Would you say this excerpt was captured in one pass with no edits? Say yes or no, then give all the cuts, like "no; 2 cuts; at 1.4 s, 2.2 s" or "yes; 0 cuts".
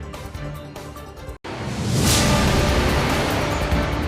no; 1 cut; at 1.4 s